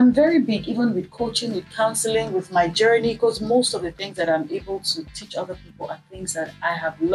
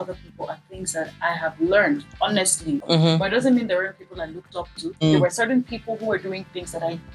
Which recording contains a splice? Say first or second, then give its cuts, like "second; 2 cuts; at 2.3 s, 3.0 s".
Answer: second; 2 cuts; at 2.8 s, 5.0 s